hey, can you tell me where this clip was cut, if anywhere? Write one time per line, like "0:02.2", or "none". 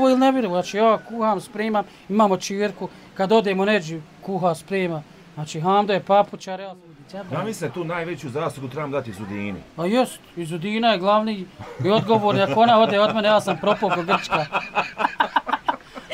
0:06.4